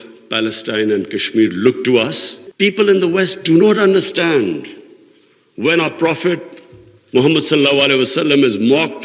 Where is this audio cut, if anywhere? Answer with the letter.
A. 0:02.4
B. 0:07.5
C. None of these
A